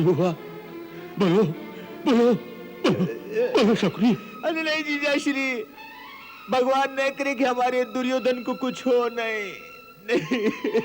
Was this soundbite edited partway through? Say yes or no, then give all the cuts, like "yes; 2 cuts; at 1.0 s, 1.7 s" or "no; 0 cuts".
no; 0 cuts